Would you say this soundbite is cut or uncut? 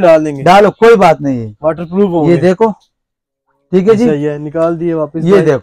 uncut